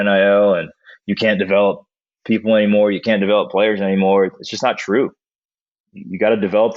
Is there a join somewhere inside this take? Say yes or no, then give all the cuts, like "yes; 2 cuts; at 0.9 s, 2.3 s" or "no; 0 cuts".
no; 0 cuts